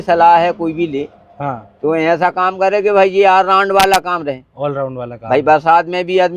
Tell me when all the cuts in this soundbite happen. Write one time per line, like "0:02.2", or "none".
none